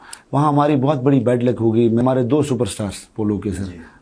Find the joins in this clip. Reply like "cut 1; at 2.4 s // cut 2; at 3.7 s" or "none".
cut 1; at 2.0 s

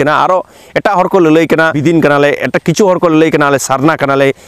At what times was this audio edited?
cut 1; at 1.8 s

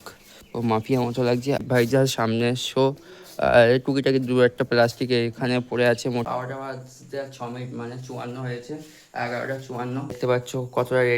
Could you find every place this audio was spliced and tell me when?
cut 1; at 1.6 s // cut 2; at 6.2 s // cut 3; at 10.2 s

